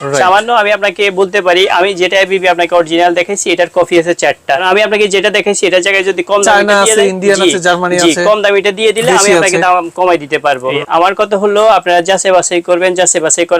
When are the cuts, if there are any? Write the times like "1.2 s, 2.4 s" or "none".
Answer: 4.6 s, 10.7 s